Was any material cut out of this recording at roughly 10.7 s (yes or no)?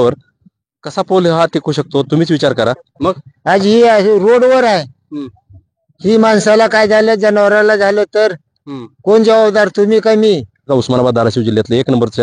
yes